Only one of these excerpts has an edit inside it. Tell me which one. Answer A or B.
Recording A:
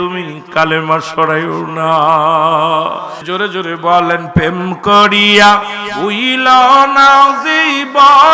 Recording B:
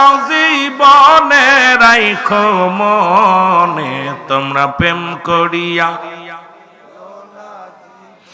A